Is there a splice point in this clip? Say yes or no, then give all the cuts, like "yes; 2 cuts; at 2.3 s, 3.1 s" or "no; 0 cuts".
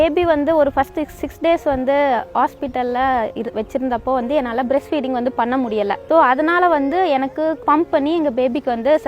yes; 2 cuts; at 6.0 s, 7.6 s